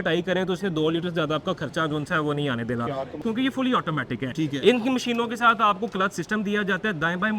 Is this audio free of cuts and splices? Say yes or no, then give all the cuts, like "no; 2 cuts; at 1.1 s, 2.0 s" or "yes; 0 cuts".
no; 1 cut; at 3.2 s